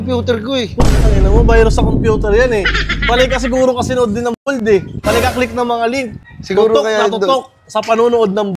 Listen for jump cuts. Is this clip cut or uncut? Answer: uncut